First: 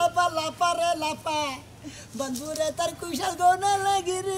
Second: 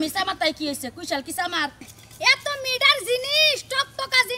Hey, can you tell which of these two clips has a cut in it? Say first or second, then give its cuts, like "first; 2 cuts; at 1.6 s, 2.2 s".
second; 1 cut; at 1.9 s